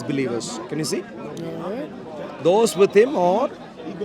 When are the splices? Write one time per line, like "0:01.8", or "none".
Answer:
none